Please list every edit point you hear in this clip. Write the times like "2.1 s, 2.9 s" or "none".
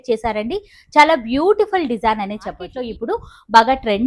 2.7 s